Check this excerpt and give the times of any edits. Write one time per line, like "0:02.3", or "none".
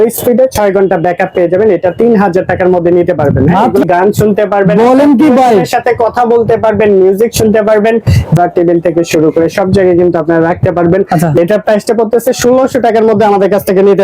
0:03.8
0:08.4
0:11.4